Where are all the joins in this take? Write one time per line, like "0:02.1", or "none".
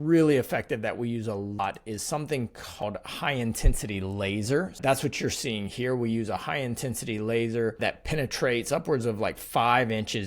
0:01.6
0:02.8
0:04.8
0:07.8

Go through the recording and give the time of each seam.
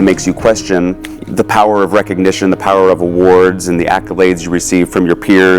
0:01.1

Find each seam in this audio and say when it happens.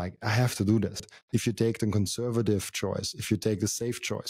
0:01.1

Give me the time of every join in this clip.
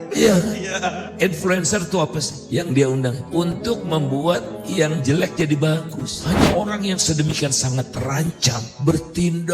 0:06.2

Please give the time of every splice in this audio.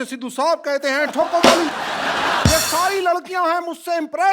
0:02.5

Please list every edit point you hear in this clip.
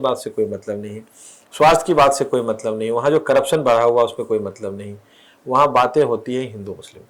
none

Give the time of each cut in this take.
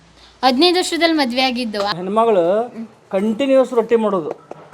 0:01.9

